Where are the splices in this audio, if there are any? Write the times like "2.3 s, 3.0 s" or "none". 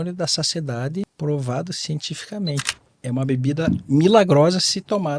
1.1 s, 2.8 s